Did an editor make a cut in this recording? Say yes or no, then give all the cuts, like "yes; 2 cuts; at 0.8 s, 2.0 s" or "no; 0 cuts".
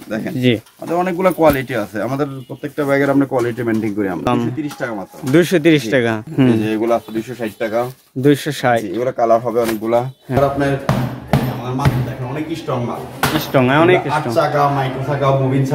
yes; 3 cuts; at 4.3 s, 6.3 s, 10.4 s